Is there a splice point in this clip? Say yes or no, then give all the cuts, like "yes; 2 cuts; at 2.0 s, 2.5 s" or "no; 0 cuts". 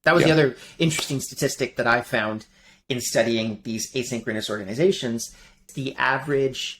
yes; 1 cut; at 5.6 s